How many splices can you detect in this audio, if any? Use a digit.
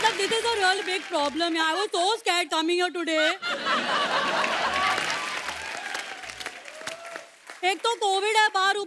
0